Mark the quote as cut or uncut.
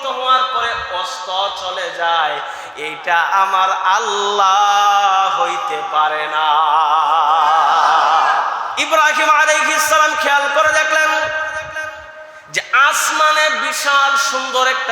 cut